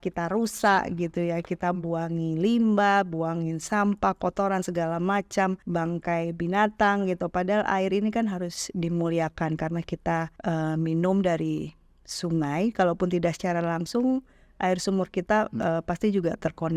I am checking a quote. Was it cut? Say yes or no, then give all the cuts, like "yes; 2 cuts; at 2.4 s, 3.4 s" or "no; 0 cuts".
yes; 2 cuts; at 5.6 s, 10.3 s